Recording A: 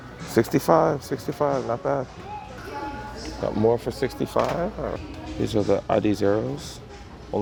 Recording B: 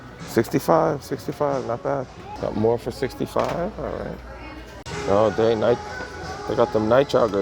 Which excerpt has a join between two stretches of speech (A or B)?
B